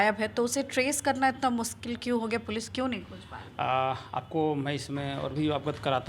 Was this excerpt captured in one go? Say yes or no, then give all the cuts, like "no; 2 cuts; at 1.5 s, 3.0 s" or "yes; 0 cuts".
yes; 0 cuts